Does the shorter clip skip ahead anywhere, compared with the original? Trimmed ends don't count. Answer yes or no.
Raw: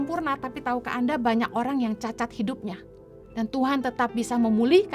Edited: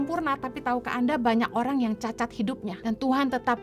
yes